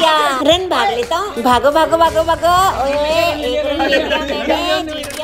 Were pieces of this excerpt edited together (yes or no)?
no